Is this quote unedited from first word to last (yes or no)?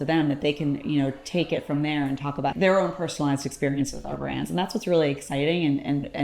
no